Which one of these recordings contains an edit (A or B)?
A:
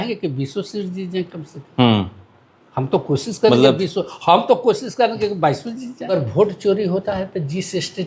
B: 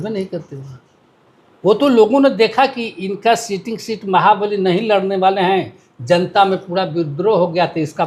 A